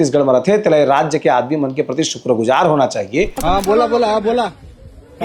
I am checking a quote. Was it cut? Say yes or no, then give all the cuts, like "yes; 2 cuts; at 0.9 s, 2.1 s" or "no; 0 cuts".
yes; 1 cut; at 3.4 s